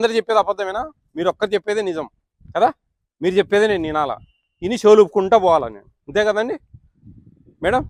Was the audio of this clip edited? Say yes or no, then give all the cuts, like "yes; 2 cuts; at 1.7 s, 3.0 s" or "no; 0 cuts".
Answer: no; 0 cuts